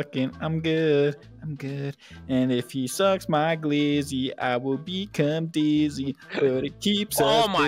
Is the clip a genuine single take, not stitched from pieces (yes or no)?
yes